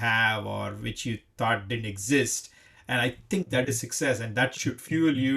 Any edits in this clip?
no; 0 cuts

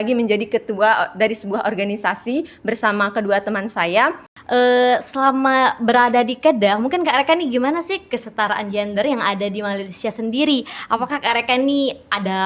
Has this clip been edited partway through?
yes; 1 cut; at 4.3 s

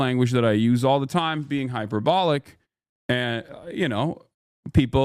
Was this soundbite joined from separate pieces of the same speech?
no; 0 cuts

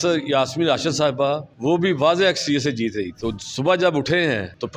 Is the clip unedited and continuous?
yes; 0 cuts

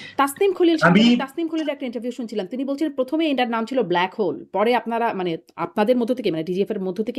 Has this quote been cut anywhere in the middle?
no; 0 cuts

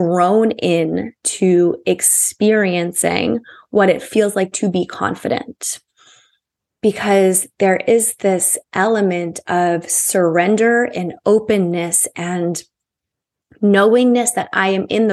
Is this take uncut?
yes; 0 cuts

